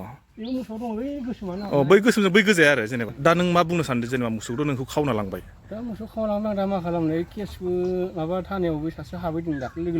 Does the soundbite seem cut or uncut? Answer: cut